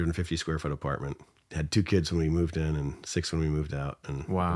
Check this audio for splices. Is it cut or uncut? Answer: uncut